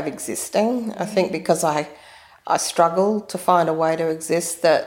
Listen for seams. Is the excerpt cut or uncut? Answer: uncut